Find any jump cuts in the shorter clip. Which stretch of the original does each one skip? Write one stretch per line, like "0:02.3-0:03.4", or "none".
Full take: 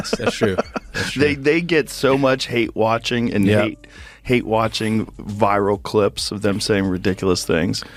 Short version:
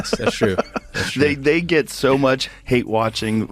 0:02.5-0:04.0